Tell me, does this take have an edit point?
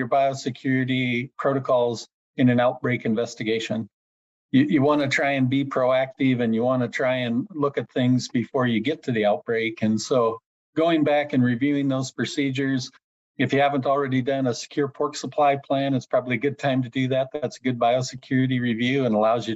no; 0 cuts

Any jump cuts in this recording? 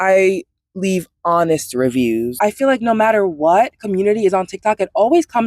yes; 1 cut; at 2.3 s

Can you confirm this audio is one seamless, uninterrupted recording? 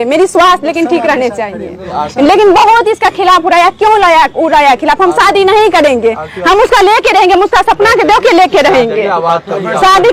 yes; 0 cuts

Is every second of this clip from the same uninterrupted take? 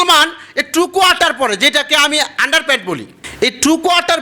no; 1 cut; at 3.2 s

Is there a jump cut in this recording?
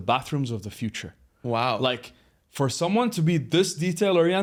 no; 0 cuts

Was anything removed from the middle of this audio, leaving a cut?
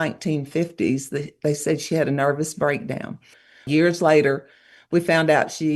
yes; 1 cut; at 3.7 s

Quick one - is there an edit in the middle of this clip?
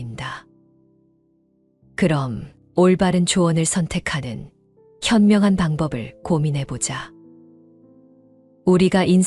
no; 0 cuts

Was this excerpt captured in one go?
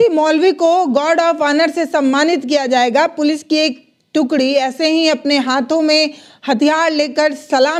yes; 0 cuts

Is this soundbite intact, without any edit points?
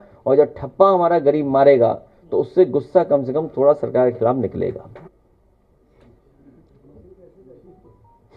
no; 1 cut; at 5.0 s

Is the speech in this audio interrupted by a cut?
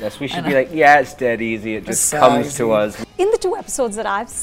yes; 1 cut; at 3.0 s

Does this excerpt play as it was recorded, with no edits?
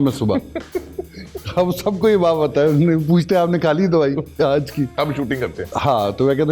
yes; 0 cuts

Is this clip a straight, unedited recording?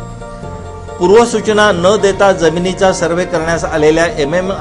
no; 1 cut; at 1.0 s

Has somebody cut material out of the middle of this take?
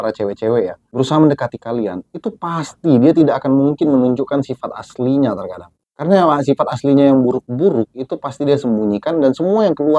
no; 0 cuts

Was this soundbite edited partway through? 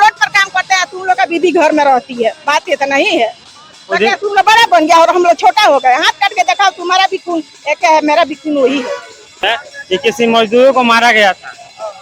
yes; 1 cut; at 9.5 s

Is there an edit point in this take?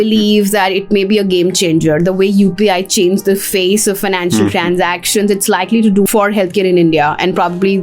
yes; 1 cut; at 6.1 s

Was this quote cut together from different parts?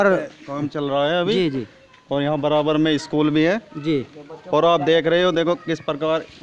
no; 0 cuts

